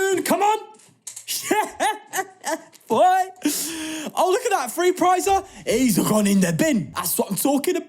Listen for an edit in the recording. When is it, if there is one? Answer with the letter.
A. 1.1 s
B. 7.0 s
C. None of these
B